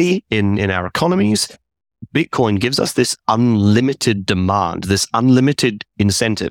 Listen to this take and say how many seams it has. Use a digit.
1